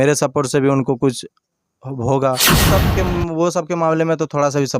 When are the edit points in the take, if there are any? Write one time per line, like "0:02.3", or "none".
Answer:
0:02.6